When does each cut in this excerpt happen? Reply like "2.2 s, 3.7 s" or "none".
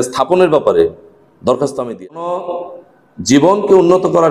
1.8 s